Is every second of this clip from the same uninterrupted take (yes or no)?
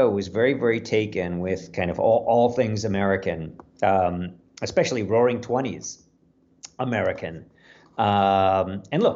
yes